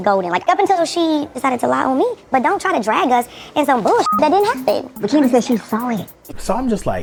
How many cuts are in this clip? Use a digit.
0